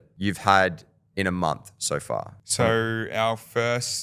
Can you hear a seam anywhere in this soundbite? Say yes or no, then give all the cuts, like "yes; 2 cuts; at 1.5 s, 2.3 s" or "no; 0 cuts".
no; 0 cuts